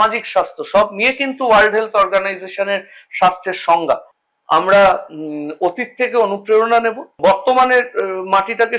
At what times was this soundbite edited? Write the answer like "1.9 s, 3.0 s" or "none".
4.2 s, 7.1 s